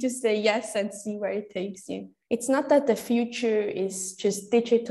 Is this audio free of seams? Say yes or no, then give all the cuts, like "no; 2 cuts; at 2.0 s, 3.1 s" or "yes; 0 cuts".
no; 1 cut; at 2.0 s